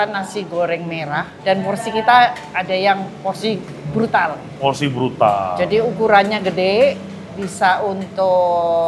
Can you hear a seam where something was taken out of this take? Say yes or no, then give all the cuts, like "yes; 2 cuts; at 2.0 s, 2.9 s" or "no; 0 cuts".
yes; 1 cut; at 1.3 s